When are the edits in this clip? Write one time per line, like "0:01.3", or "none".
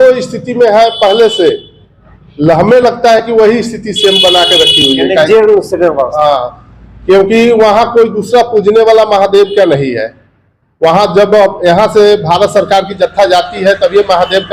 none